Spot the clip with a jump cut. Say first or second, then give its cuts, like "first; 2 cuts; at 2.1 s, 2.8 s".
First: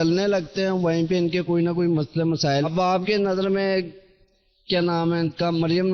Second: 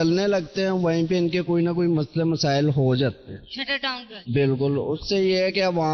first; 1 cut; at 2.7 s